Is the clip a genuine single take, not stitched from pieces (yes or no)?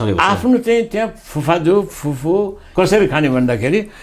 no